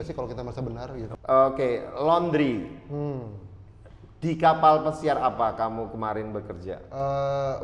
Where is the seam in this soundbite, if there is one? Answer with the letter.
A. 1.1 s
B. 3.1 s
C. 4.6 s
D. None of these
A